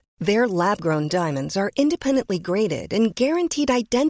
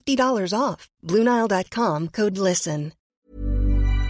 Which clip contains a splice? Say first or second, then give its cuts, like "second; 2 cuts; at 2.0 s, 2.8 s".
second; 1 cut; at 3.0 s